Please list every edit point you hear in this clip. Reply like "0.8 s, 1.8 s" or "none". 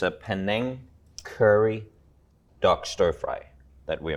none

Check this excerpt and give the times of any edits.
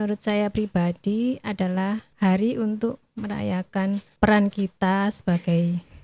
2.1 s, 3.0 s, 4.1 s

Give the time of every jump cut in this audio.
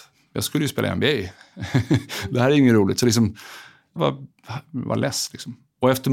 4.0 s

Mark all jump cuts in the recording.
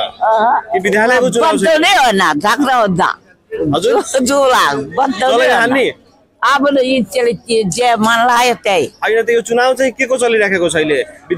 none

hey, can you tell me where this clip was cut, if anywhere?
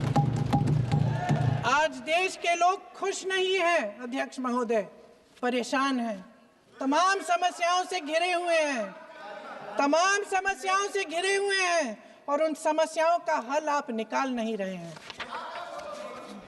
none

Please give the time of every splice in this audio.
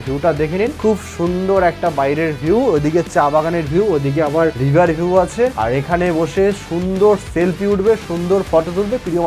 none

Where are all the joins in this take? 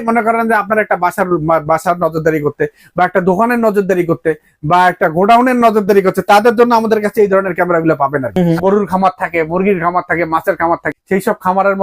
8.3 s, 10.9 s

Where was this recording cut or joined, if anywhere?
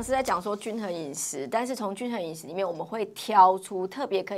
none

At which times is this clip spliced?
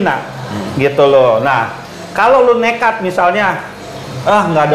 none

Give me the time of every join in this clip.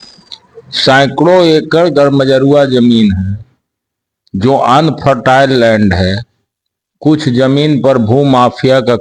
none

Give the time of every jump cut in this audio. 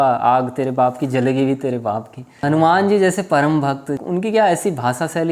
2.4 s, 4.0 s

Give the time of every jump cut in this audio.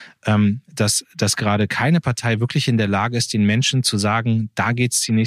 none

